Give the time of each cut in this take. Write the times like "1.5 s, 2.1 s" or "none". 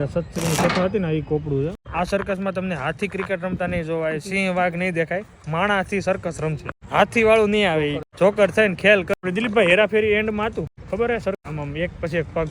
1.8 s, 6.7 s, 8.0 s, 9.1 s, 10.8 s, 11.4 s